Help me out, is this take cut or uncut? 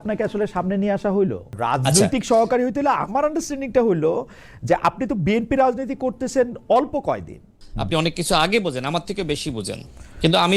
cut